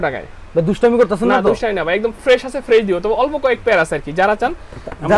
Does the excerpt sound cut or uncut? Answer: uncut